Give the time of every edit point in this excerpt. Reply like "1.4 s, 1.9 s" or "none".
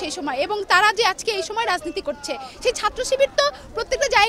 2.5 s